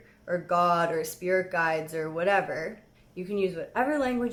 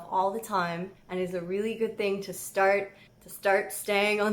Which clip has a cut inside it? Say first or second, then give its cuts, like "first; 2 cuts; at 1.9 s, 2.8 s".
second; 1 cut; at 0.9 s